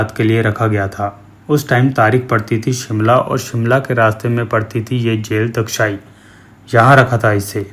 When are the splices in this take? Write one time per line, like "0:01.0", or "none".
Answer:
none